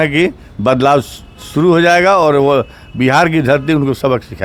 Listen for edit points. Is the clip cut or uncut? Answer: uncut